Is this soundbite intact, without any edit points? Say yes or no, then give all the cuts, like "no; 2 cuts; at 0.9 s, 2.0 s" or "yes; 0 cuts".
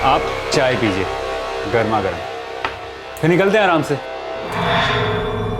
no; 1 cut; at 4.5 s